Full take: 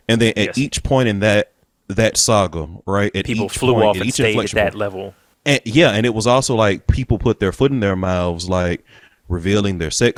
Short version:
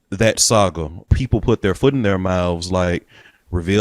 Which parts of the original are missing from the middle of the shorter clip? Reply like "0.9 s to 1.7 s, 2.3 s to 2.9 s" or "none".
2.8 s to 6.8 s